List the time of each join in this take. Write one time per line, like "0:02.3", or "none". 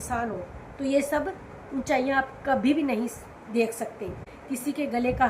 0:04.3